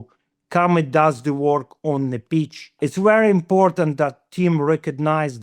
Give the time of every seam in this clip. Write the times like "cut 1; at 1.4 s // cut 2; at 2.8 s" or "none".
cut 1; at 2.8 s